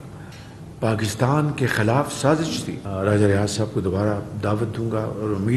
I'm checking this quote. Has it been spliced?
yes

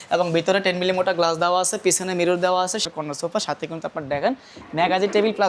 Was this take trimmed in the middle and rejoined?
yes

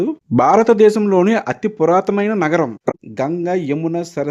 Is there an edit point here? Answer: yes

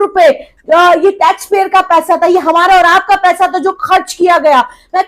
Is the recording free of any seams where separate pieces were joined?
yes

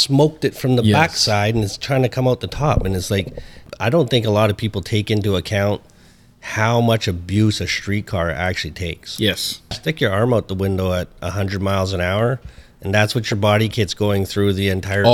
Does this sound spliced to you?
yes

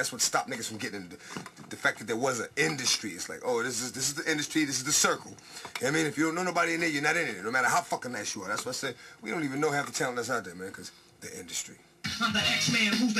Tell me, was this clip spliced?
yes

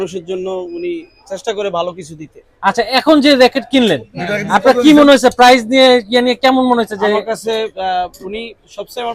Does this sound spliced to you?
no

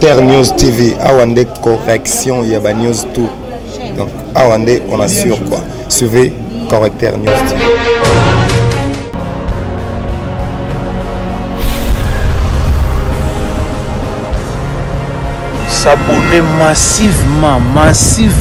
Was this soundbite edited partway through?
no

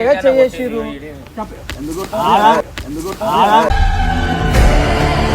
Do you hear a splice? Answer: no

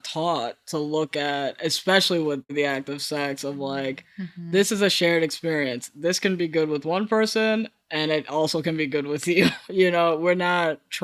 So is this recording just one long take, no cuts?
no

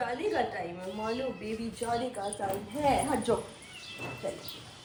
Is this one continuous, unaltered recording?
yes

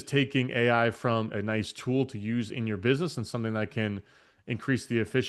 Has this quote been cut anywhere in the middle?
no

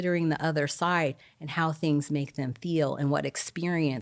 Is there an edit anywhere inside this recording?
no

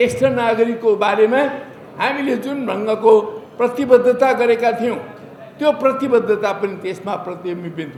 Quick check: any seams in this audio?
no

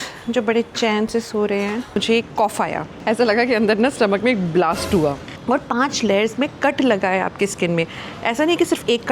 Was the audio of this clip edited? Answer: yes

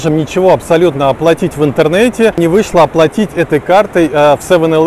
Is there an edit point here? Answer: yes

